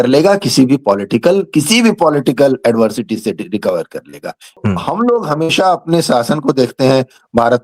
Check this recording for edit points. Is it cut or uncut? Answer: cut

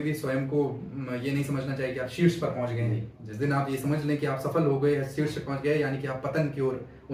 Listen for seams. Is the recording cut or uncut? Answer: uncut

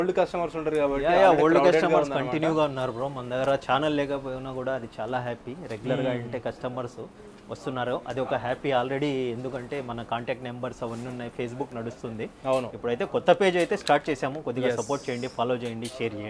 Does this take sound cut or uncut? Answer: uncut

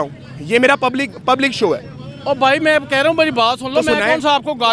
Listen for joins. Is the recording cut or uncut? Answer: uncut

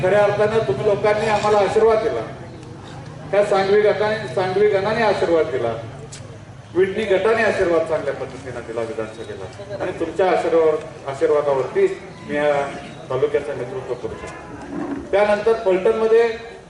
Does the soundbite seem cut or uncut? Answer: uncut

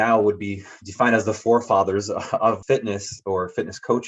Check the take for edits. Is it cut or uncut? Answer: cut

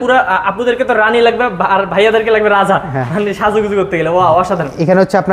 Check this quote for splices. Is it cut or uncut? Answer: uncut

